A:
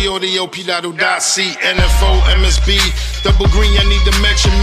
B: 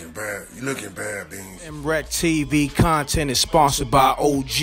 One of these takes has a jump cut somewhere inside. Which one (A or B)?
B